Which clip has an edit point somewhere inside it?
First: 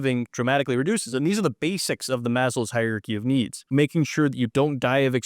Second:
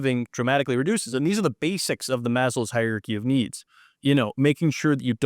first; 1 cut; at 3.6 s

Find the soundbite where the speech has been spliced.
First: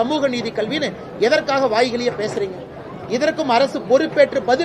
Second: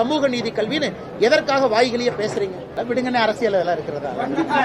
second; 1 cut; at 2.7 s

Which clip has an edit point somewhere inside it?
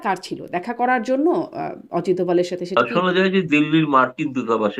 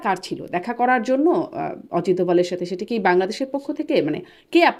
first; 1 cut; at 2.8 s

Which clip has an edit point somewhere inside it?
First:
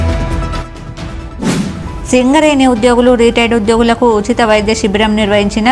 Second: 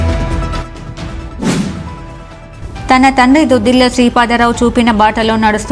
first; 1 cut; at 1.7 s

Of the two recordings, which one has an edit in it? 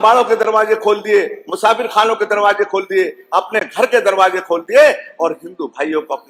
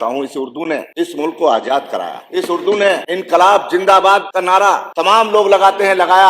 second; 4 cuts; at 0.9 s, 2.2 s, 3.1 s, 4.5 s

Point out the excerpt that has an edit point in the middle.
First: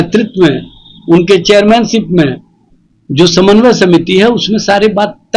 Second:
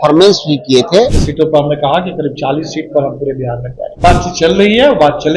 second; 2 cuts; at 1.2 s, 3.9 s

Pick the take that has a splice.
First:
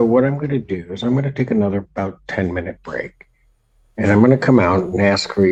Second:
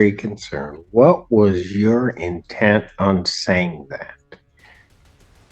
second; 1 cut; at 4.6 s

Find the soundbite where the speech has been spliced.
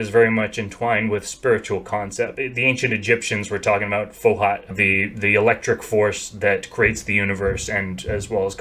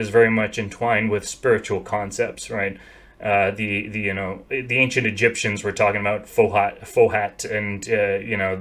first; 2 cuts; at 2.3 s, 4.7 s

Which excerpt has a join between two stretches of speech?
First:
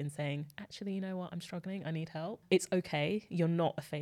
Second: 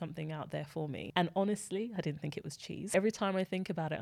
second; 2 cuts; at 1.0 s, 2.9 s

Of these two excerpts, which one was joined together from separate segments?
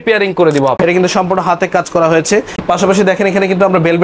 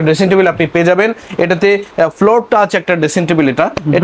first; 2 cuts; at 0.8 s, 2.6 s

